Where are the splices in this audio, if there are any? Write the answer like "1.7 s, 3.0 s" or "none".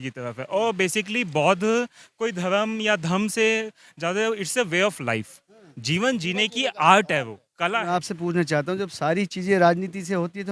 7.8 s